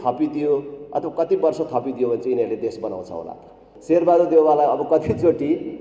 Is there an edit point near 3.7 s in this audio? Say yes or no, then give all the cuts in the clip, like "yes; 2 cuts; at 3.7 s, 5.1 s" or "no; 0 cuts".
yes; 1 cut; at 3.7 s